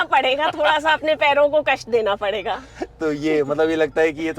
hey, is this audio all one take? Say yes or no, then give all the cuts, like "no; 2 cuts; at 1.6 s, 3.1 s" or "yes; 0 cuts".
yes; 0 cuts